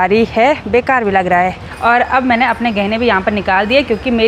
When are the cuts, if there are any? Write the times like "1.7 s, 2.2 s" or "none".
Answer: 1.6 s